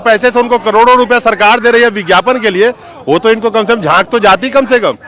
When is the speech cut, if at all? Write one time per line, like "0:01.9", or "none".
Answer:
none